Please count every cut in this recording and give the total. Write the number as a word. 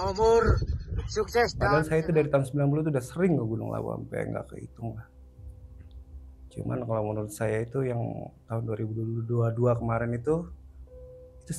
one